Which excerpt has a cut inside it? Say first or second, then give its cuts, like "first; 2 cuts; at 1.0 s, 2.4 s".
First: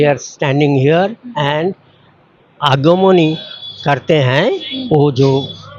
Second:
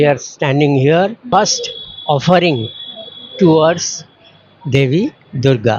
second; 1 cut; at 1.2 s